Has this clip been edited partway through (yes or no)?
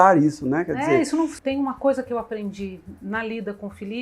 yes